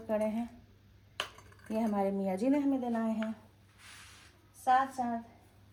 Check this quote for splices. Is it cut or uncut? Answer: uncut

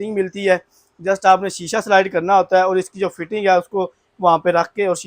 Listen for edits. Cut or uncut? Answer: uncut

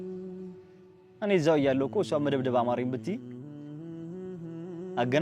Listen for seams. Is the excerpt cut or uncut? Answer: cut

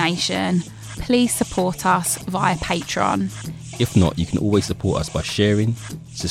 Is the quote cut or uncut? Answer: uncut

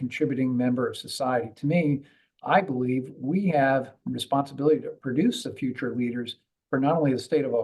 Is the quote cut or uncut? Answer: cut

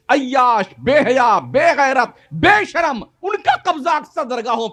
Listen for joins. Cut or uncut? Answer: uncut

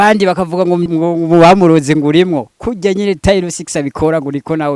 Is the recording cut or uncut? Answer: cut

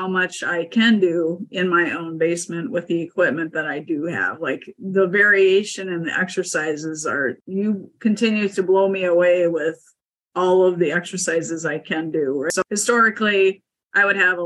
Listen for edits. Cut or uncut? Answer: cut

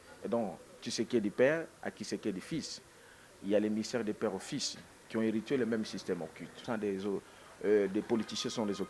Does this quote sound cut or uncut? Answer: cut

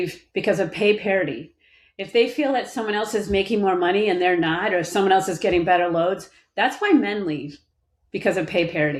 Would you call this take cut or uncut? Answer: uncut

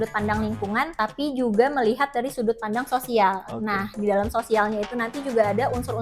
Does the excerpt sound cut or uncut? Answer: cut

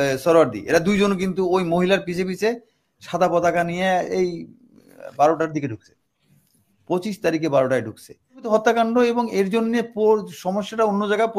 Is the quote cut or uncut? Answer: cut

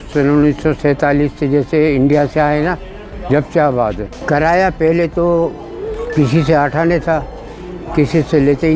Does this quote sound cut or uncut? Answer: cut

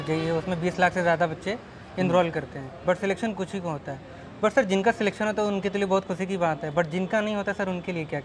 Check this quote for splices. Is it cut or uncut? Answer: uncut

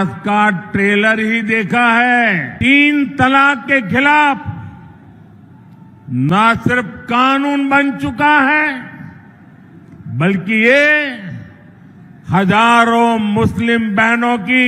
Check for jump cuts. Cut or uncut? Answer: cut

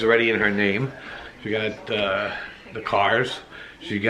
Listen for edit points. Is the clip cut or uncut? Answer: uncut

